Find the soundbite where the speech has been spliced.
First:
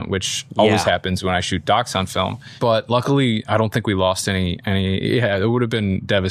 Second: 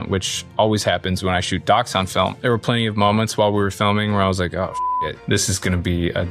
second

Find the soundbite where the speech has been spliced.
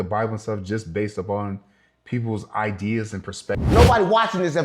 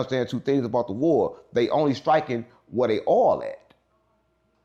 first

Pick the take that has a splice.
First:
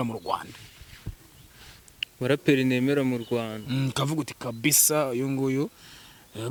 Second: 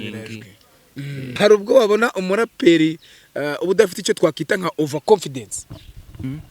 second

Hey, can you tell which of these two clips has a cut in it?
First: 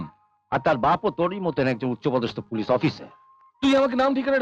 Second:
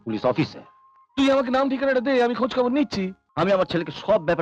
second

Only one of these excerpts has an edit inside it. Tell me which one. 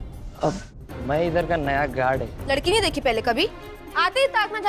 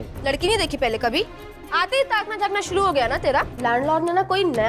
second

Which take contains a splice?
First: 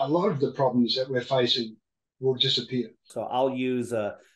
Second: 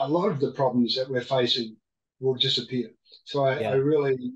first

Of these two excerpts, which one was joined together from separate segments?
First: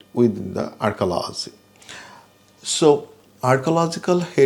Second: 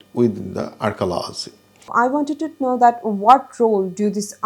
second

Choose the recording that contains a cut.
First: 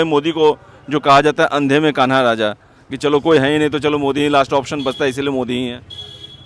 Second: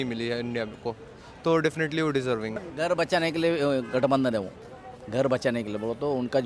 second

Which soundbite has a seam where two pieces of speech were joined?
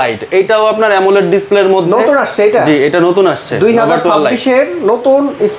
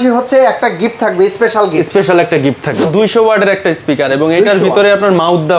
second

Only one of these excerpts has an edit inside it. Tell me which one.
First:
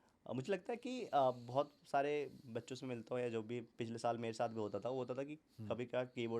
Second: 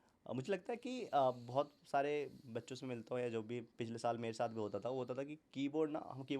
first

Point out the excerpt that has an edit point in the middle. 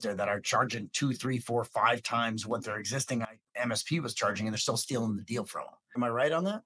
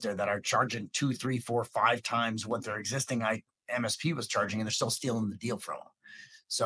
first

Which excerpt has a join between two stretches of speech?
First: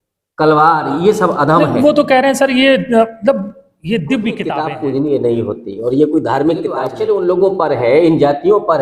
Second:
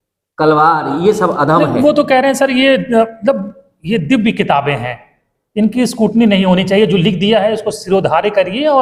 first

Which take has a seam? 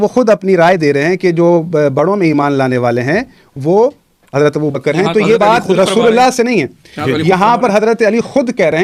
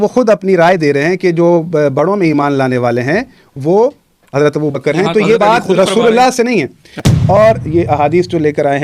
second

